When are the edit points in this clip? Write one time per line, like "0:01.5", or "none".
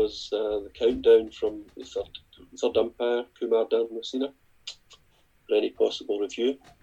none

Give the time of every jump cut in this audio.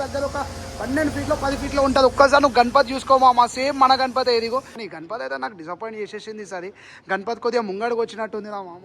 0:04.8

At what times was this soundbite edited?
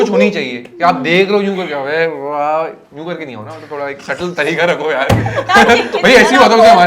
none

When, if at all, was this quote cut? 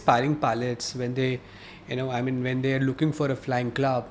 none

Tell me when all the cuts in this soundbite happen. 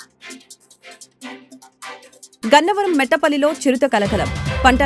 none

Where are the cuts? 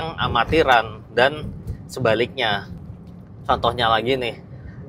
none

